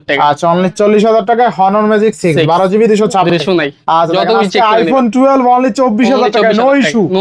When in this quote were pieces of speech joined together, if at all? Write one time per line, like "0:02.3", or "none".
0:03.4